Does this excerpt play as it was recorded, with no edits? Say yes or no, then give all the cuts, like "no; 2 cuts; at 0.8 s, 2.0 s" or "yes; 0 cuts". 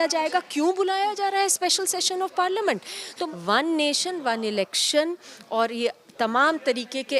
no; 1 cut; at 3.3 s